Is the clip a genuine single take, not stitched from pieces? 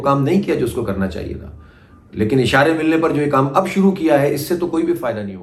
yes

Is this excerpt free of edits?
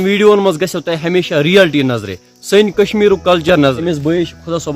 no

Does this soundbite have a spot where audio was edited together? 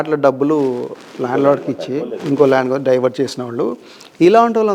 no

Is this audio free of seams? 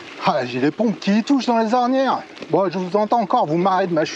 yes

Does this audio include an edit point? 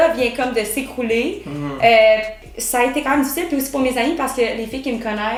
no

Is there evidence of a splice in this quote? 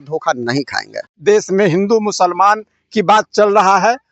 yes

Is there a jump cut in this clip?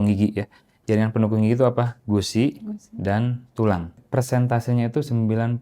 yes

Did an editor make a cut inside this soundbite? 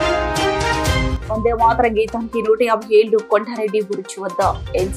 no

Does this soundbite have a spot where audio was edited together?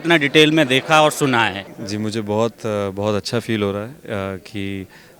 yes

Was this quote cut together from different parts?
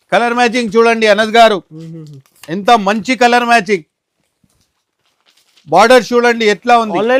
no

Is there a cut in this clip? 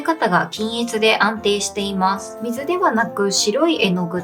no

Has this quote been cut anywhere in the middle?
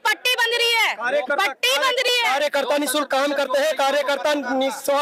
no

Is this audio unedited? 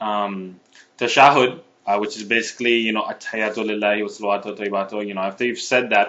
no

